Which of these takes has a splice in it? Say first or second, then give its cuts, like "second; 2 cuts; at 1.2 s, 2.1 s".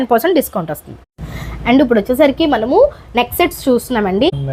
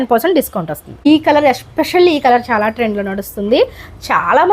second; 1 cut; at 1.1 s